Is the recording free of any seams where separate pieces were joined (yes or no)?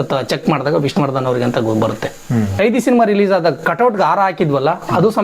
no